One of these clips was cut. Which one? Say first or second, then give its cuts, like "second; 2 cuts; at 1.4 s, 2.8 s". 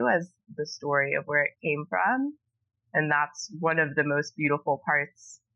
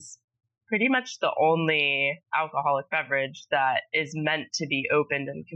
second; 1 cut; at 2.2 s